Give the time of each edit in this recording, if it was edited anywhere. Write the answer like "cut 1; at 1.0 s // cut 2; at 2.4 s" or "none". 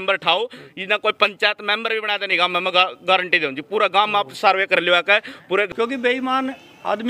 cut 1; at 5.7 s

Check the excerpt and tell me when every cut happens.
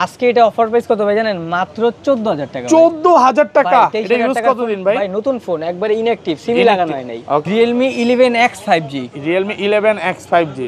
cut 1; at 7.4 s

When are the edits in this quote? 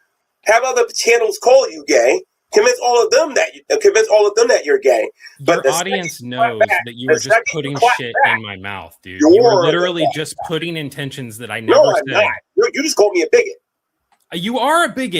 cut 1; at 1.8 s

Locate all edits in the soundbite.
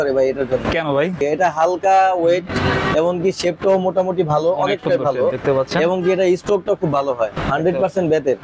cut 1; at 1.2 s // cut 2; at 7.4 s

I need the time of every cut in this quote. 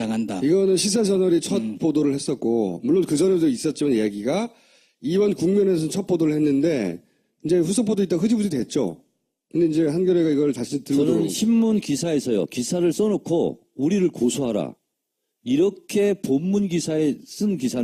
cut 1; at 4.9 s

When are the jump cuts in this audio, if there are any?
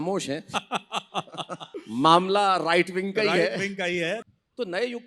cut 1; at 1.6 s // cut 2; at 4.2 s

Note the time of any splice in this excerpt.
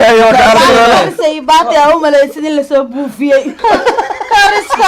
cut 1; at 3.6 s

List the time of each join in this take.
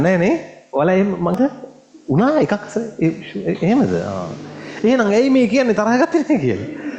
cut 1; at 1.4 s

